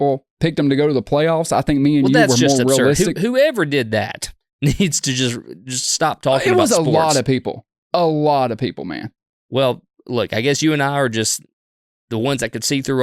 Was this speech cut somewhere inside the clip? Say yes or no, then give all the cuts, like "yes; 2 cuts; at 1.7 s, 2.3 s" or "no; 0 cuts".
no; 0 cuts